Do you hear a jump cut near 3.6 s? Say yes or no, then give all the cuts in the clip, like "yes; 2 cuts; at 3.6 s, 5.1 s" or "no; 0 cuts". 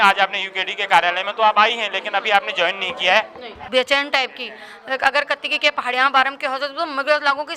yes; 1 cut; at 3.6 s